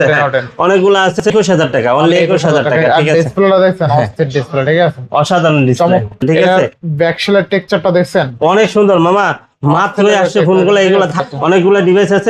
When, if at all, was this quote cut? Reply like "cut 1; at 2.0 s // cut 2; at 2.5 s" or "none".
cut 1; at 1.2 s // cut 2; at 6.2 s // cut 3; at 11.2 s